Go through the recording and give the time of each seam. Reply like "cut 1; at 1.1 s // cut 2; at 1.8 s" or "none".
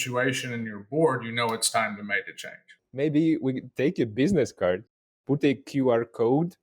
cut 1; at 2.8 s